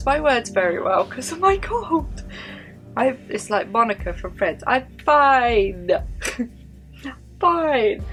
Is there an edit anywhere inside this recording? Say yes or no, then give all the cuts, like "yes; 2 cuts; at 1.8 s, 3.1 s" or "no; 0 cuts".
no; 0 cuts